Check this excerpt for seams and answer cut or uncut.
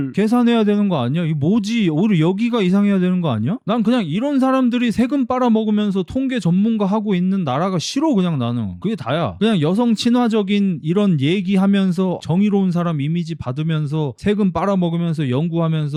uncut